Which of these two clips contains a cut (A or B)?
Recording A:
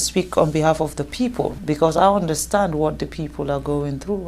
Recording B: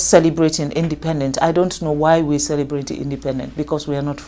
A